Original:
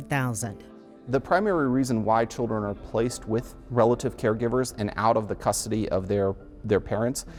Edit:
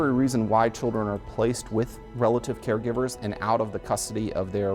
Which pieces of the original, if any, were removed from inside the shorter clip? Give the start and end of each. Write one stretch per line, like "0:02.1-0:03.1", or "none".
none